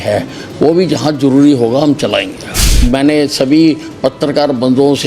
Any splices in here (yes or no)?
yes